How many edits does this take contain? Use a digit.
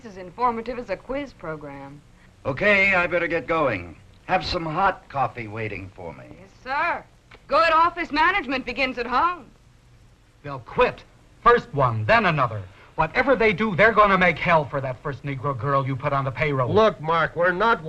1